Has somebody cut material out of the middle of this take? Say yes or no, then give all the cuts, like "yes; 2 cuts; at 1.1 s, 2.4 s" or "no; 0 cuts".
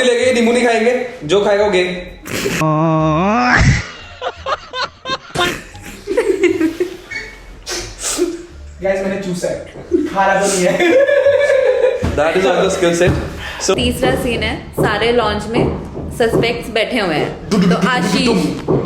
no; 0 cuts